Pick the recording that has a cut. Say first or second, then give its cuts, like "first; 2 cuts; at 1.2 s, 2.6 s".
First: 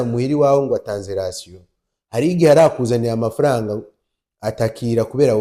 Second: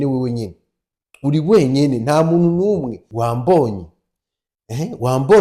second; 1 cut; at 3.0 s